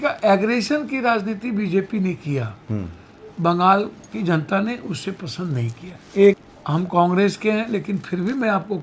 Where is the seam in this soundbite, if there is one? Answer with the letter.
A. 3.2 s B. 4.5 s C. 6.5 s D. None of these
C